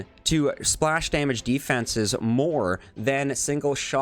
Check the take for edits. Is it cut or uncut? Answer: uncut